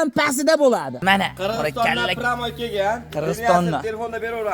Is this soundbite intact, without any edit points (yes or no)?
no